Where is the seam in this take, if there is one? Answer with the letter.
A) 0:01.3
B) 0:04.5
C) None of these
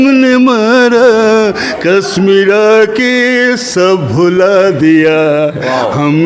C